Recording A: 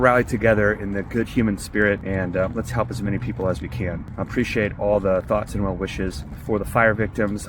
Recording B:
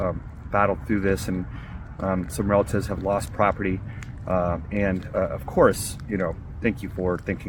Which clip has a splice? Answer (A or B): A